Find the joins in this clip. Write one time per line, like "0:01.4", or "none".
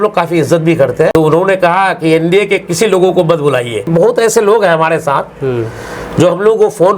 0:01.1
0:03.9